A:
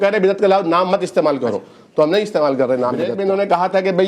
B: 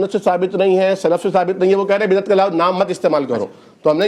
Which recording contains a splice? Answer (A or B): A